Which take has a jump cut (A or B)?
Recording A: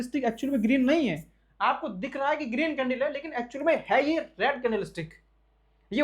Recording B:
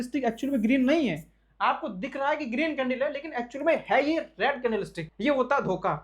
B